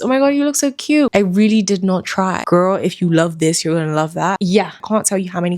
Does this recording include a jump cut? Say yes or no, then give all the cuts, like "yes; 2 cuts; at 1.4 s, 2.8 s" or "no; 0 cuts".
yes; 3 cuts; at 1.1 s, 2.4 s, 4.7 s